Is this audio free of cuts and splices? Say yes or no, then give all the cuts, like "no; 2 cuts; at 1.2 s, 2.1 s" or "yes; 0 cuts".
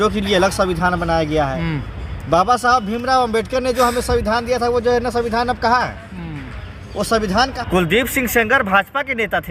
no; 1 cut; at 7.6 s